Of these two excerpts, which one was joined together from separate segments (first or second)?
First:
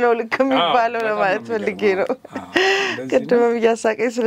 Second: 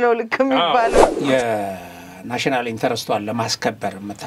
second